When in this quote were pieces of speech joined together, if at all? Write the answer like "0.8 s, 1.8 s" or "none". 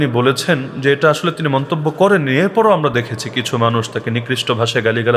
none